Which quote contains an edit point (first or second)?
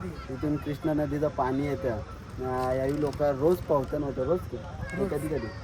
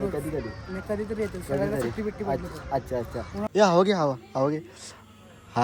second